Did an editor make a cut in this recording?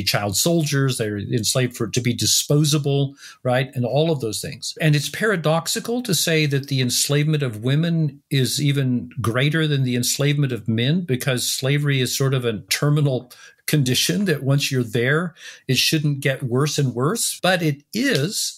no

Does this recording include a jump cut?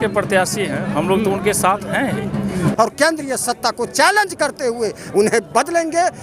yes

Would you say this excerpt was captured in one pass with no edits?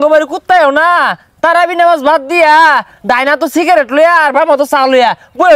yes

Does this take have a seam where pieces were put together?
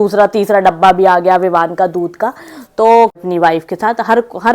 yes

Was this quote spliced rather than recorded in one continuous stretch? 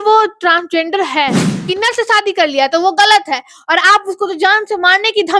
yes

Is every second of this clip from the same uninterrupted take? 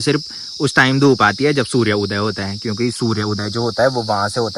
yes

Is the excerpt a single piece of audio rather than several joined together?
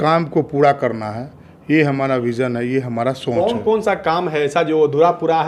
yes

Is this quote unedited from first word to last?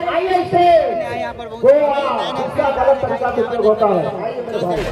yes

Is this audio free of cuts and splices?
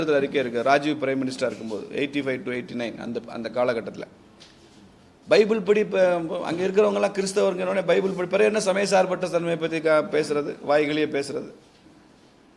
yes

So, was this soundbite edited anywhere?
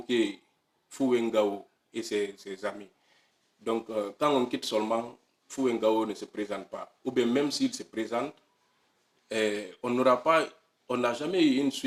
no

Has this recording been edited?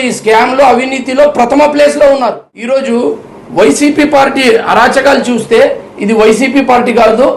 yes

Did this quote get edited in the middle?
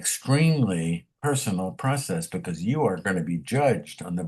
yes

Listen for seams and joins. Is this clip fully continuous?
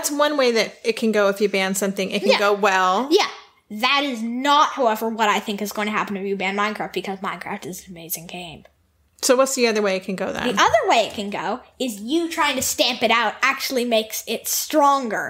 yes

